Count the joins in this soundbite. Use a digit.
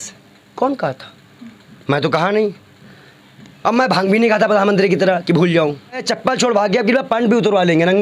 1